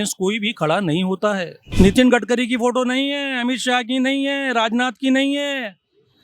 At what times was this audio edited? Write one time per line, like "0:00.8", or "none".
0:01.6